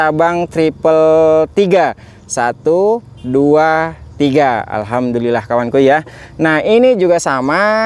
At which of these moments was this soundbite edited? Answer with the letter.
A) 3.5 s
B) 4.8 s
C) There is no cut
C